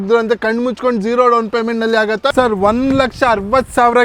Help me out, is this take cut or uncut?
cut